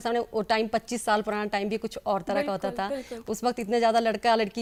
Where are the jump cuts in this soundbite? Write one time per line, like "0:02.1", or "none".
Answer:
none